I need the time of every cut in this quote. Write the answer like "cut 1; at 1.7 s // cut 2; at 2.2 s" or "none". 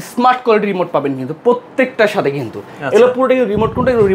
none